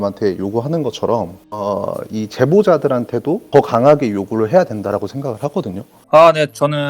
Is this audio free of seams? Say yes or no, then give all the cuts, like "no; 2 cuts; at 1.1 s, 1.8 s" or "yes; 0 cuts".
no; 1 cut; at 6.0 s